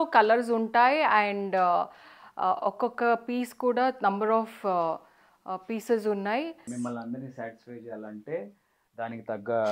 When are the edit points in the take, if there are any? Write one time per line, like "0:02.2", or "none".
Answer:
0:06.6

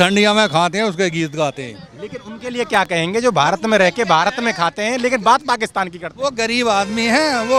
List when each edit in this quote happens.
none

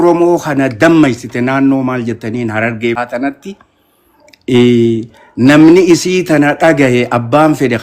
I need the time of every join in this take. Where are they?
0:03.0

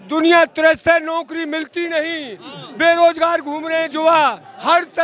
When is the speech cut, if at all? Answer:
none

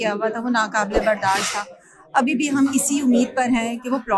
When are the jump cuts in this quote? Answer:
none

